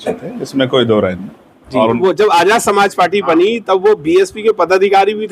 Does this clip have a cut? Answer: yes; 1 cut; at 2.0 s

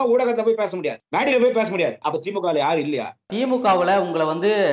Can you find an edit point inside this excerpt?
yes; 3 cuts; at 1.0 s, 2.0 s, 3.3 s

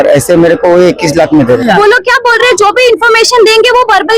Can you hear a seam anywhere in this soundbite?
yes; 1 cut; at 1.6 s

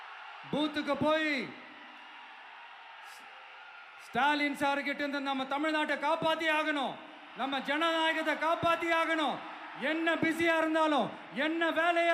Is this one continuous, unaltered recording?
yes; 0 cuts

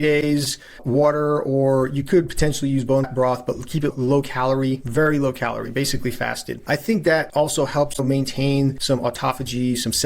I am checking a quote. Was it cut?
yes; 3 cuts; at 6.6 s, 7.3 s, 8.8 s

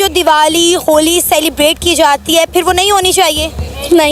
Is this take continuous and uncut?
yes; 0 cuts

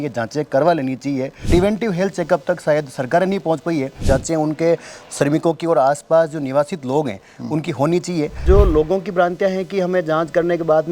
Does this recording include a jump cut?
yes; 3 cuts; at 1.4 s, 4.0 s, 8.4 s

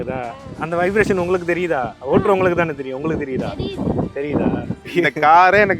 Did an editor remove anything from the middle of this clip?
yes; 1 cut; at 4.9 s

